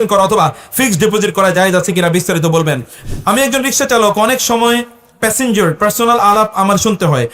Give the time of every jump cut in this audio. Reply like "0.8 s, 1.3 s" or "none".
2.9 s